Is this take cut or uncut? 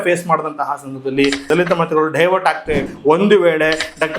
cut